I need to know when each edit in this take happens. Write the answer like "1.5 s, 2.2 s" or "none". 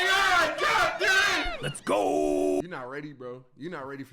2.6 s

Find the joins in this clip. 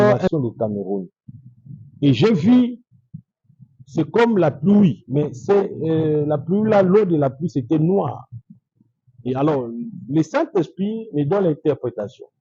none

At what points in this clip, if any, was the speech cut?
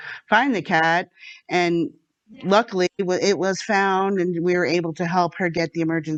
none

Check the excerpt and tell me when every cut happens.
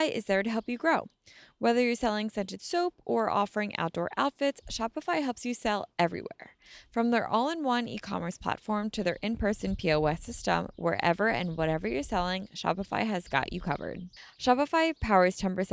14.1 s

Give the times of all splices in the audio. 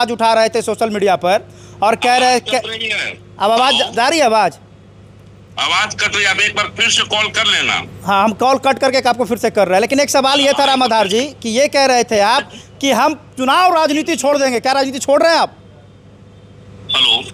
none

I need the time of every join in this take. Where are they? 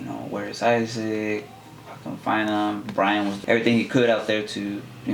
3.4 s

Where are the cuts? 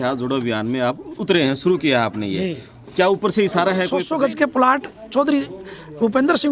4.0 s

